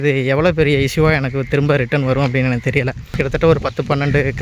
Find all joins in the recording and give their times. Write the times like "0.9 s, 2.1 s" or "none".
3.0 s